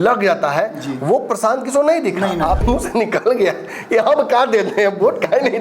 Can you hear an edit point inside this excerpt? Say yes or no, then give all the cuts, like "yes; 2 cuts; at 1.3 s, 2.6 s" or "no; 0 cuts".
yes; 1 cut; at 2.6 s